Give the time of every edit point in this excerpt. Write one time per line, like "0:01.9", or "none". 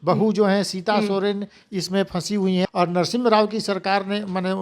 0:02.6

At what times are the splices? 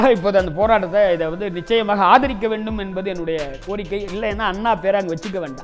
none

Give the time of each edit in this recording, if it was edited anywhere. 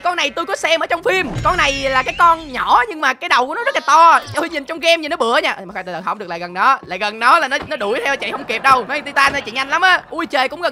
none

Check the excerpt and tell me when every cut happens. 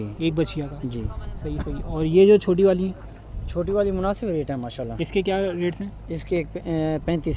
none

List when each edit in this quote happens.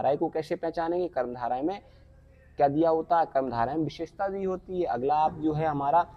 none

